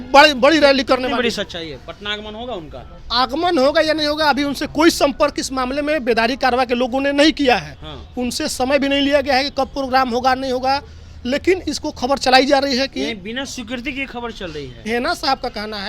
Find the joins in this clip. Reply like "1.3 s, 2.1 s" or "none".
14.8 s